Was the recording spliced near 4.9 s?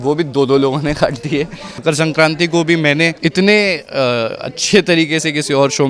no; 2 cuts; at 1.7 s, 3.1 s

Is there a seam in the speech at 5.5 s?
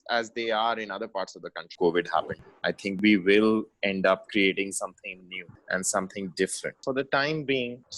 no; 2 cuts; at 1.7 s, 6.8 s

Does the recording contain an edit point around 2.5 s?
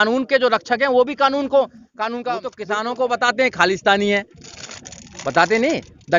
yes; 1 cut; at 2.5 s

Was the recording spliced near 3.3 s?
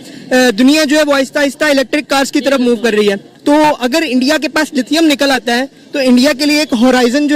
yes; 1 cut; at 3.3 s

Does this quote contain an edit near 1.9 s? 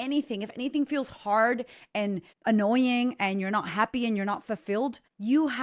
no; 0 cuts

